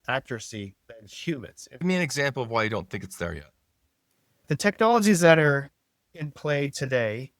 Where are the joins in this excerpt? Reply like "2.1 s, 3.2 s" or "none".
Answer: none